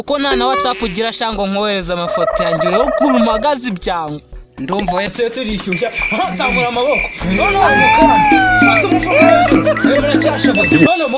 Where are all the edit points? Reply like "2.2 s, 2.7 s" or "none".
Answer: 5.1 s